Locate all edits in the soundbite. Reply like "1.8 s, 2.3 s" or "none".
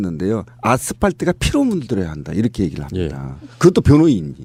none